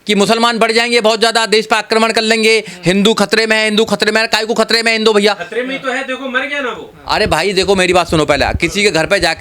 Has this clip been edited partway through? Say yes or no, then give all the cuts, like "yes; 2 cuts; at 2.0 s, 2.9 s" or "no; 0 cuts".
no; 0 cuts